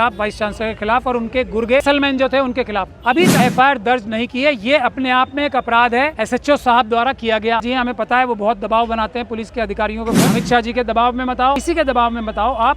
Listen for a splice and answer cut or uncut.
cut